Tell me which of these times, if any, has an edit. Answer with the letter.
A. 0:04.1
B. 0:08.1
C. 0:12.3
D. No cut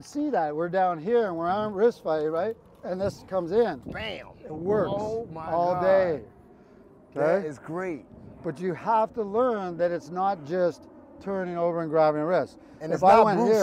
D